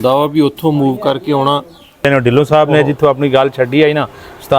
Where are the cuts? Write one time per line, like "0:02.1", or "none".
0:02.0

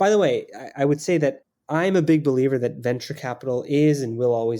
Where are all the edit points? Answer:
0:01.5

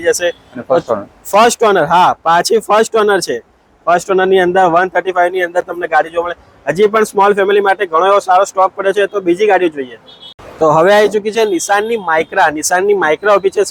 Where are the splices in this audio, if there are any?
none

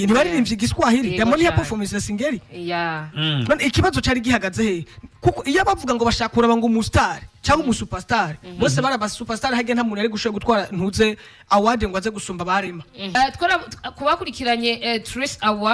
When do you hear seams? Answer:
0:13.2

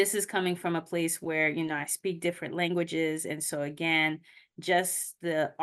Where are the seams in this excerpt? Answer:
none

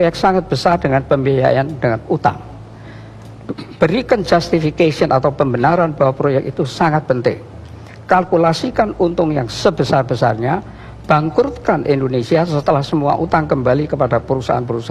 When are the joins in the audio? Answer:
none

